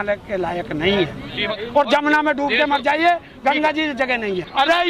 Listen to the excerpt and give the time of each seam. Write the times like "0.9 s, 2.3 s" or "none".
1.6 s